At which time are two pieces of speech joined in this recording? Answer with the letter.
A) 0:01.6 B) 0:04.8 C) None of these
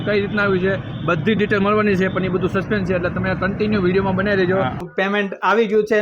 B